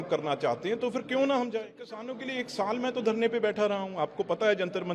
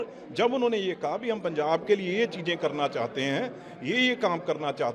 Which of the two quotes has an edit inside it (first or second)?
first